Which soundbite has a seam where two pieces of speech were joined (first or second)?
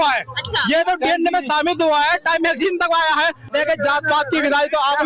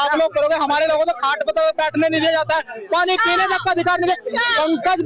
first